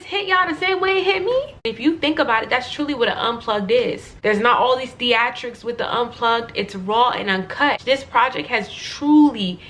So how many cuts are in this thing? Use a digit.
3